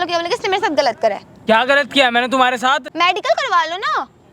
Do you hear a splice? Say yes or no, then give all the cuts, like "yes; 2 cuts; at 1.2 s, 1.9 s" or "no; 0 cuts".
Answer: yes; 2 cuts; at 1.3 s, 2.9 s